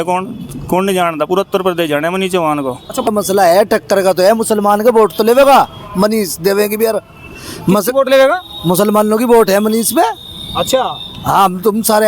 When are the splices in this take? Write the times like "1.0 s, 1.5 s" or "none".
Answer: 3.1 s

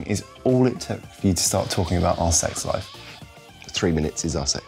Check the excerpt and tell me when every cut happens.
none

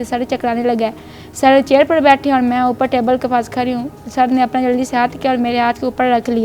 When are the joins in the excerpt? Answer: none

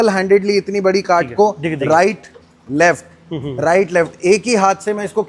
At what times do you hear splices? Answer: none

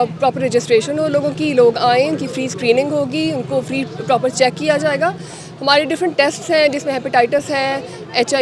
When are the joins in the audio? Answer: none

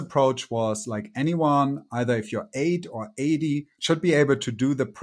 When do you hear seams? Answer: 3.7 s

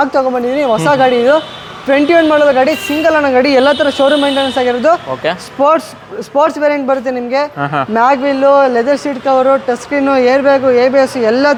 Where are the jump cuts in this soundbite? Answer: none

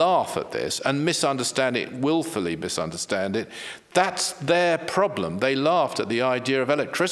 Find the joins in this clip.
none

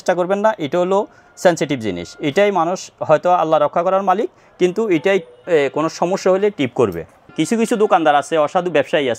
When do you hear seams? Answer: 7.2 s

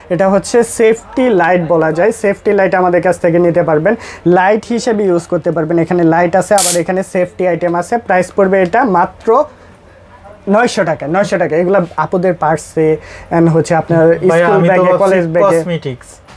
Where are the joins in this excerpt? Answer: none

